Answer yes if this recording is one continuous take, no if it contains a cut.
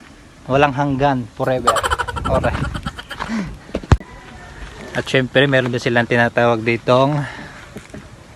yes